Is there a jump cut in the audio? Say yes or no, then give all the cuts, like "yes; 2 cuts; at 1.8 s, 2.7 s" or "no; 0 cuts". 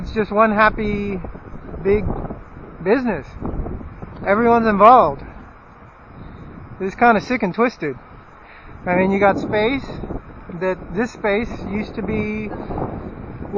yes; 1 cut; at 8.8 s